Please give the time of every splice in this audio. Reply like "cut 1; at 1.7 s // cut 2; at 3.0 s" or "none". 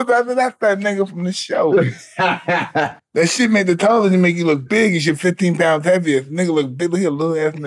none